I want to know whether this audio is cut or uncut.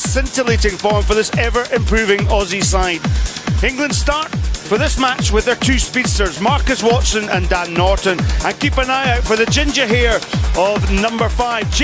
cut